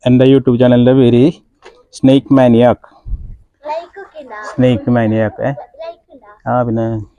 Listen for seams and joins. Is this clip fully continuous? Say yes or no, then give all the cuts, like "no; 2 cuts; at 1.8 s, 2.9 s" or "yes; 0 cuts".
yes; 0 cuts